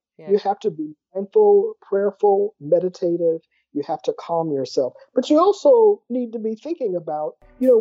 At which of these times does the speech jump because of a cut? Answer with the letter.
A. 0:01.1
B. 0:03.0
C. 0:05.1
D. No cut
D